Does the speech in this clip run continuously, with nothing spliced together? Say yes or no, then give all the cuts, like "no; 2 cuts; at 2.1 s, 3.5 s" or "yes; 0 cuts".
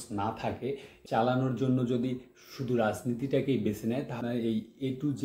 no; 2 cuts; at 0.9 s, 4.2 s